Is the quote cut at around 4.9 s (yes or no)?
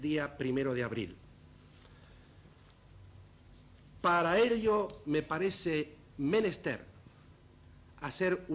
no